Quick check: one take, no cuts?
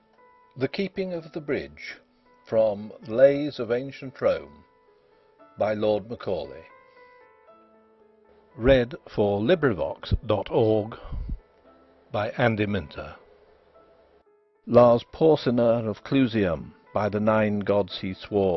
yes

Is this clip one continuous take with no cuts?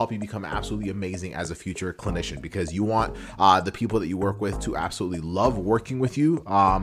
yes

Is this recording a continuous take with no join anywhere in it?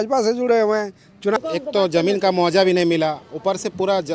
no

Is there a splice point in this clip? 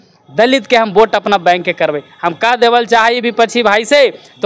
no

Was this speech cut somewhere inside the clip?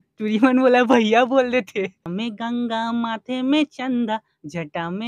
yes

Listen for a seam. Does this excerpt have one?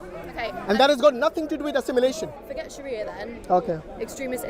yes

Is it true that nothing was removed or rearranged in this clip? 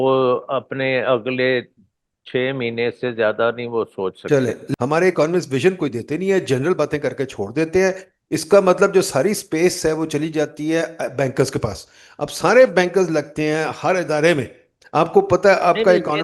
no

